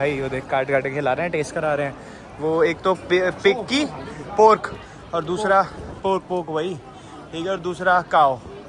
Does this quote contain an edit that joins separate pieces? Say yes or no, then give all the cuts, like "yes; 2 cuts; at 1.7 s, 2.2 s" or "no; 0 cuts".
no; 0 cuts